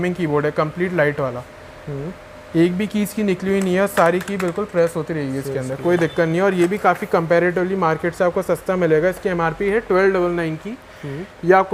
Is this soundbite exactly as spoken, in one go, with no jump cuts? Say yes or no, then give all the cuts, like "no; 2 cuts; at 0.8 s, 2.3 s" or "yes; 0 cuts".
yes; 0 cuts